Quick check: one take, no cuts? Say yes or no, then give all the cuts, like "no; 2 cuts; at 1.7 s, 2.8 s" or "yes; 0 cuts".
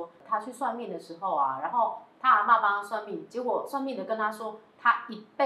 yes; 0 cuts